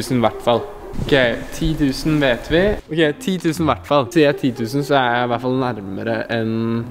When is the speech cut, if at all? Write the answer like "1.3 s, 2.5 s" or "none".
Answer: none